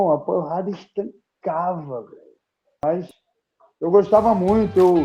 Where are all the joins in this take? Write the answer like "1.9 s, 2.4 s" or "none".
2.8 s